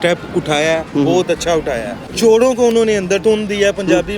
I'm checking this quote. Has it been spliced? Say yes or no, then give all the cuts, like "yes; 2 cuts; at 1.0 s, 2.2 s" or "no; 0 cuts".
yes; 2 cuts; at 2.1 s, 3.2 s